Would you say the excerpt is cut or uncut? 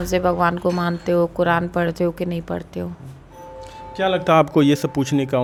uncut